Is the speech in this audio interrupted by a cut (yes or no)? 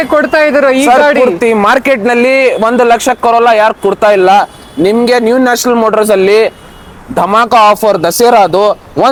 no